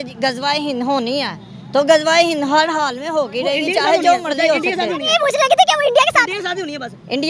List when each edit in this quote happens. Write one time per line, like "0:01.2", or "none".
none